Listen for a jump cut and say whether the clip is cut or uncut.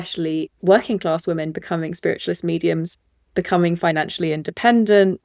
uncut